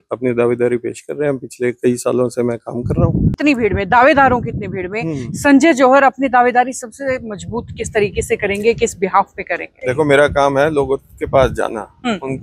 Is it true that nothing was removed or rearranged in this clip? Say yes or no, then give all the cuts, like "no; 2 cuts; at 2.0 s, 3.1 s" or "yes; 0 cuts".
no; 2 cuts; at 3.3 s, 9.8 s